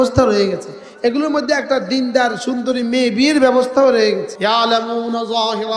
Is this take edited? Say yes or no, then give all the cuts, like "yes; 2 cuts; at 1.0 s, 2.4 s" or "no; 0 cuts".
yes; 1 cut; at 4.3 s